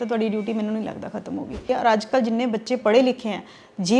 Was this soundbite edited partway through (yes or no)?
yes